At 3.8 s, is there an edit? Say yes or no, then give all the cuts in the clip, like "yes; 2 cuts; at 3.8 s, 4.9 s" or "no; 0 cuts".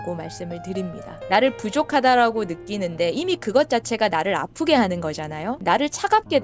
no; 1 cut; at 1.2 s